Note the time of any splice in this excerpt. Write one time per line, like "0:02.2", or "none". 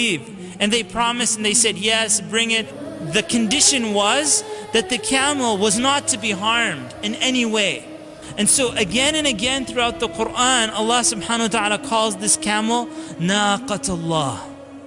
0:02.8
0:08.2

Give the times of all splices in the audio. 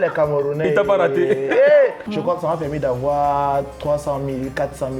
0:02.0

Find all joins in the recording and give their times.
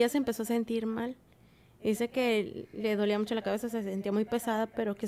none

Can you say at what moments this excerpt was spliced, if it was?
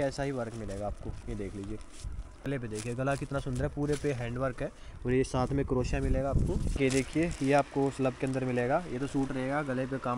0:02.4
0:06.7

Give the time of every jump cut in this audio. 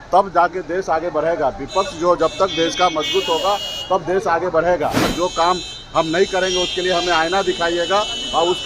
0:05.1

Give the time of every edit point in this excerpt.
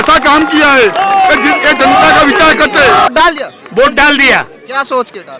0:03.1

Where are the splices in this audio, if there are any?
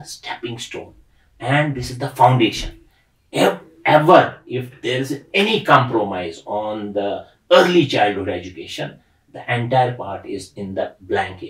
none

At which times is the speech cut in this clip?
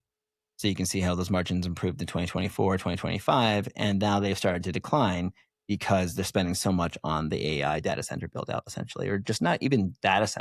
none

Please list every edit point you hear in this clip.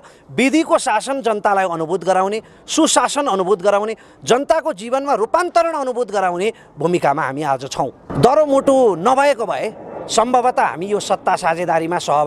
0:08.0

